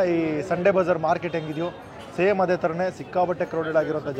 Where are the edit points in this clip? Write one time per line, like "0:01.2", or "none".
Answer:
none